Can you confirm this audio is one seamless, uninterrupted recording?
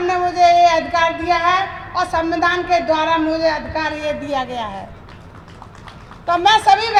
yes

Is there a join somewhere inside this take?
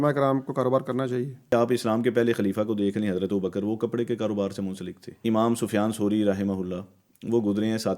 yes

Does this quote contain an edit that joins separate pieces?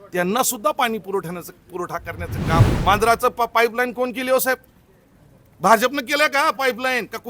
yes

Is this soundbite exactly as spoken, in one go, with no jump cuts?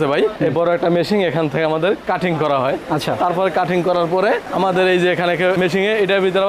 yes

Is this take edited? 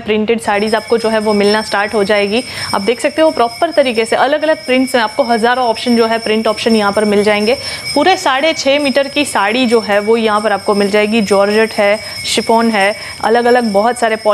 no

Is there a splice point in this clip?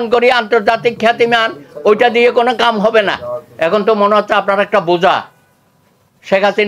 yes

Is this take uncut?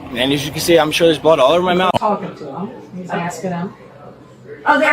no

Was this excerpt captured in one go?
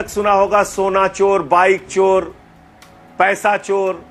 yes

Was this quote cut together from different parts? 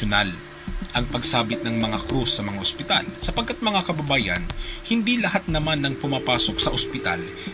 yes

